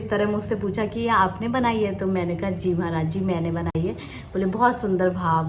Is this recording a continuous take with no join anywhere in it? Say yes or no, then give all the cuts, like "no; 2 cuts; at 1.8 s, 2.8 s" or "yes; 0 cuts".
yes; 0 cuts